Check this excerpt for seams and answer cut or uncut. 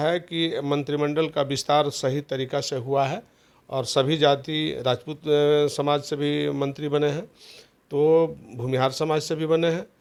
uncut